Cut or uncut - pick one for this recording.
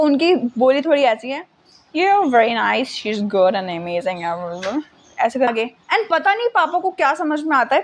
cut